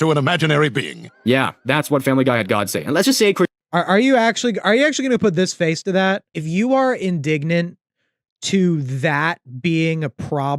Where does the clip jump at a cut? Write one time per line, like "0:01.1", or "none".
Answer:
0:06.5